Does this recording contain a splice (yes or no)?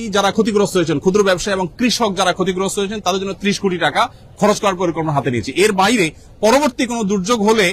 no